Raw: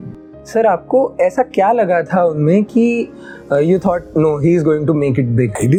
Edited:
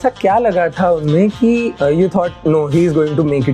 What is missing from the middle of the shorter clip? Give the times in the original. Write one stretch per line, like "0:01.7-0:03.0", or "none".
0:03.1-0:03.4